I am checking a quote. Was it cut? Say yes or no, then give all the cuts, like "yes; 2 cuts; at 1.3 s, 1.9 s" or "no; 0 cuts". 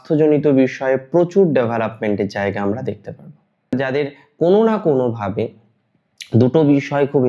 yes; 1 cut; at 3.7 s